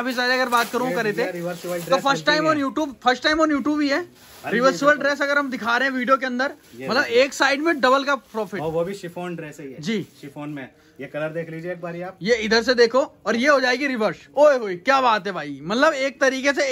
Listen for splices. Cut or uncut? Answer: uncut